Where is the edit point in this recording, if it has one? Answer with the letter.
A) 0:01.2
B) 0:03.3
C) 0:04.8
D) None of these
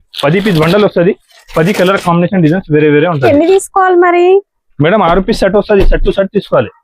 B